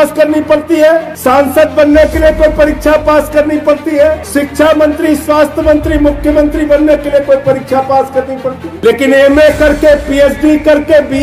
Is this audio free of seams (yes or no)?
no